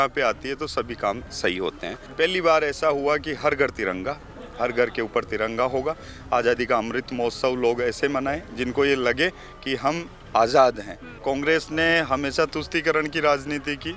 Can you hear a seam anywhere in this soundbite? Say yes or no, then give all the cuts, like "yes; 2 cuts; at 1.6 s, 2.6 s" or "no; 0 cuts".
yes; 2 cuts; at 2.0 s, 11.1 s